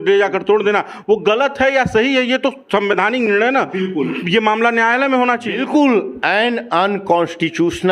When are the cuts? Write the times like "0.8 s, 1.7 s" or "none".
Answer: 5.5 s